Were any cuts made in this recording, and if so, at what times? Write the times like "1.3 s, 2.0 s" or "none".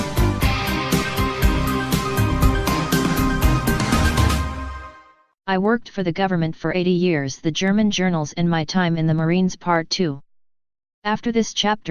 1.8 s